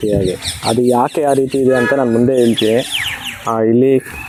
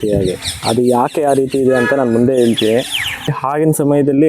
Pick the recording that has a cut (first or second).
second